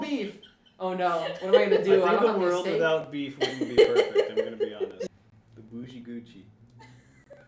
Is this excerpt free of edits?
no; 1 cut; at 5.1 s

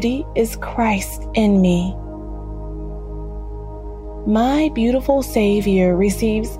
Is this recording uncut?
yes; 0 cuts

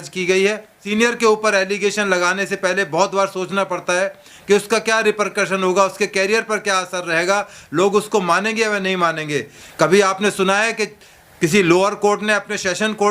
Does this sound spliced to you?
yes; 2 cuts; at 0.9 s, 9.6 s

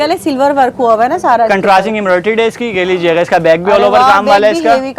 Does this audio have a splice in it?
no; 0 cuts

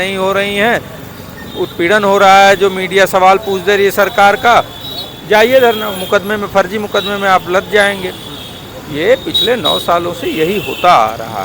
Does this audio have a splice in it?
no; 0 cuts

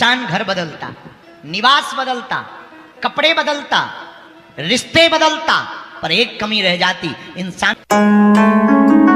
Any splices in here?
yes; 1 cut; at 7.7 s

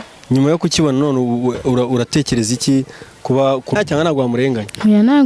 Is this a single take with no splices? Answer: no; 1 cut; at 3.8 s

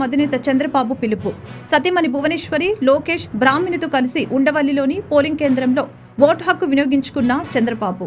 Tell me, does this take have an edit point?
no; 0 cuts

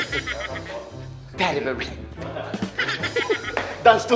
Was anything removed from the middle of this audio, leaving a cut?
no; 0 cuts

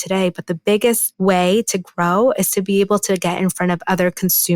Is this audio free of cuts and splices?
no; 1 cut; at 1.1 s

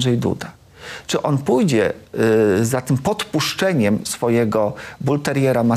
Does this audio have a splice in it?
no; 0 cuts

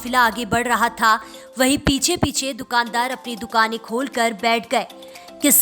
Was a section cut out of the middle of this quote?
no; 0 cuts

